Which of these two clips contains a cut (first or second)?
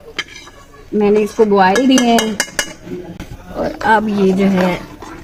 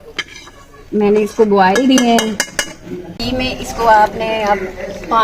second